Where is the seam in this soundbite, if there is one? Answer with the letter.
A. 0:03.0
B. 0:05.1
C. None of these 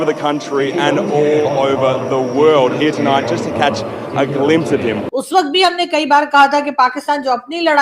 B